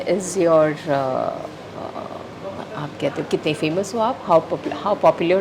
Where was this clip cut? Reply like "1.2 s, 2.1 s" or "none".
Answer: none